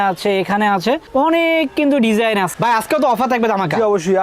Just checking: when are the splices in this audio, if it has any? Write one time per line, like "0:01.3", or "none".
0:02.5